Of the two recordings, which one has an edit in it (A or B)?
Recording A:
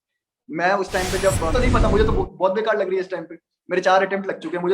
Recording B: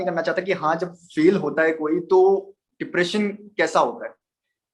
A